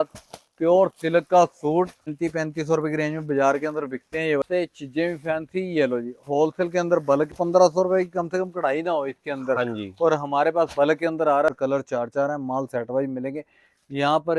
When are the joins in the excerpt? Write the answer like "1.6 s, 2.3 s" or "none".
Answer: 2.1 s, 4.4 s, 7.3 s, 11.5 s